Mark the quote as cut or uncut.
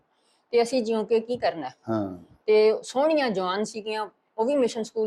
uncut